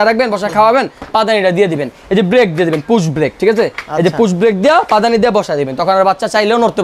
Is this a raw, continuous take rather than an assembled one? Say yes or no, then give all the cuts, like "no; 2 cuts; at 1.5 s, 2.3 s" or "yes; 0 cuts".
yes; 0 cuts